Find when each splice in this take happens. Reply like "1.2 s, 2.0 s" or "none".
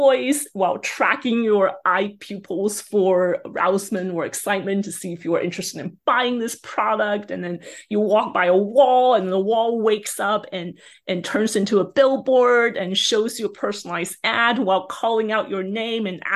none